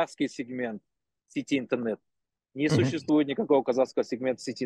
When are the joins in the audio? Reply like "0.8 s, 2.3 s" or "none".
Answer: none